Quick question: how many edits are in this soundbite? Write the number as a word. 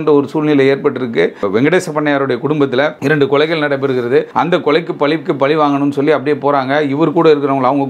three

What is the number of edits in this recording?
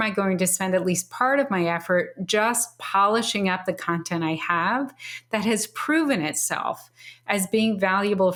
zero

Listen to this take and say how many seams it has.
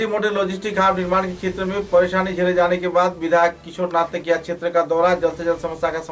zero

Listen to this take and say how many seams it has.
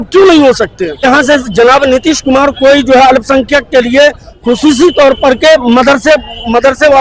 one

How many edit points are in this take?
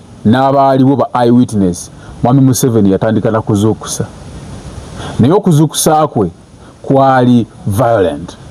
zero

